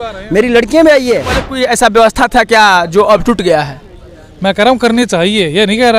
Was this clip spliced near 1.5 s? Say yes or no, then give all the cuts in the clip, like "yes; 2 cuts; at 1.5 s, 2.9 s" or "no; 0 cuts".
yes; 1 cut; at 1.5 s